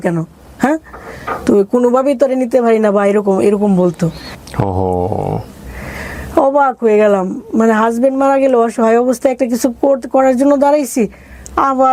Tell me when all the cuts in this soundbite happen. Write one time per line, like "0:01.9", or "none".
none